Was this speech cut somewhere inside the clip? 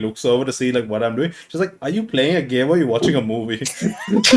no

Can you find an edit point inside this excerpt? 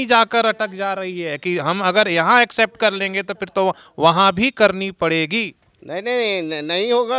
no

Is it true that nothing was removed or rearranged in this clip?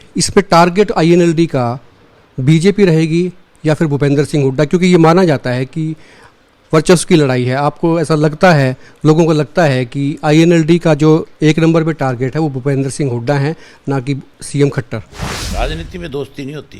no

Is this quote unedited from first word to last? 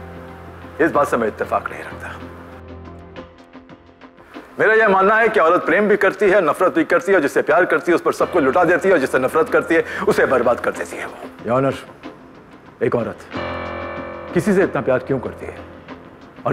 yes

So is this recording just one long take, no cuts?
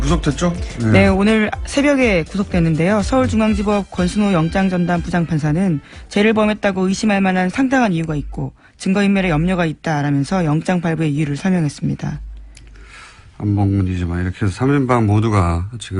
no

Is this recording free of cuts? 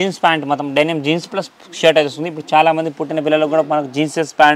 yes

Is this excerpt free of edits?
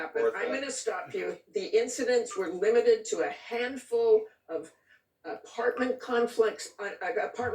no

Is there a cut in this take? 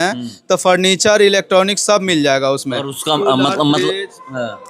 no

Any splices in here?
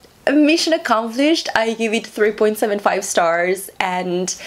no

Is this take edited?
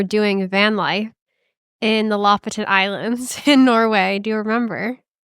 no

